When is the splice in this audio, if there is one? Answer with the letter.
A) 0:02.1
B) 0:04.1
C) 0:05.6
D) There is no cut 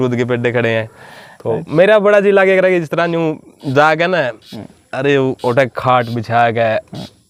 D